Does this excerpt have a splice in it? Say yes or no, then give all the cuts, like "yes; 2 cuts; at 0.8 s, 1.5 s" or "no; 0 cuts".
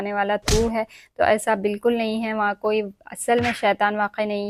no; 0 cuts